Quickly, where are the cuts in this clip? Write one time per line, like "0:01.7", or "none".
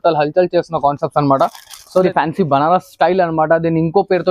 0:02.0